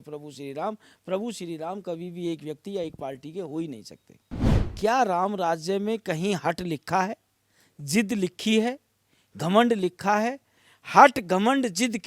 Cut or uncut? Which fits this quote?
cut